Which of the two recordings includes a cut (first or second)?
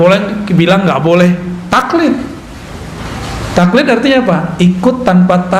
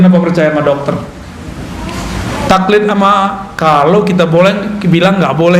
second